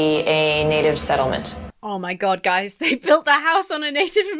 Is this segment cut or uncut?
uncut